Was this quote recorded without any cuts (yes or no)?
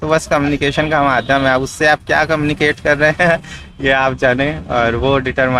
yes